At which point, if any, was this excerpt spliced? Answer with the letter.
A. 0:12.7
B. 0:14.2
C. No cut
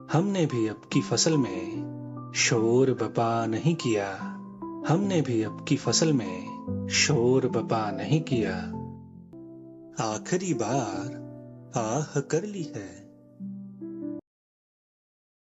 C